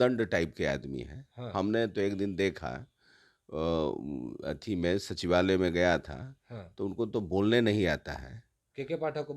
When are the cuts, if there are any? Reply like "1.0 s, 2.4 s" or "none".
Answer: none